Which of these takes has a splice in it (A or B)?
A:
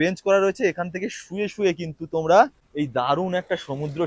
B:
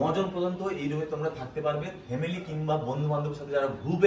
A